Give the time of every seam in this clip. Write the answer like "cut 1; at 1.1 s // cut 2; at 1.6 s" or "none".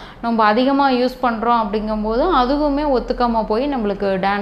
none